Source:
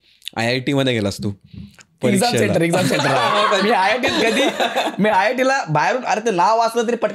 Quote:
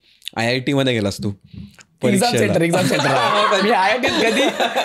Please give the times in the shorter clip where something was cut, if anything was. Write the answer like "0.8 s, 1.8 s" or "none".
none